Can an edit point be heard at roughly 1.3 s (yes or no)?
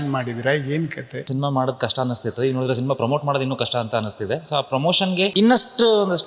yes